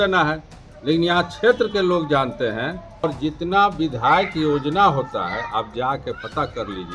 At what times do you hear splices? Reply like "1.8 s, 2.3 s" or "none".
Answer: 3.0 s